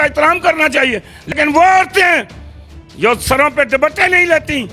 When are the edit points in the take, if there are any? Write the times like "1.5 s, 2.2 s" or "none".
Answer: 1.3 s